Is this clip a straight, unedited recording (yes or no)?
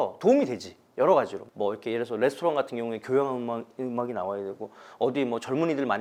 yes